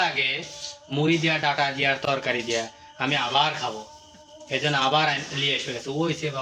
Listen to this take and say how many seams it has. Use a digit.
0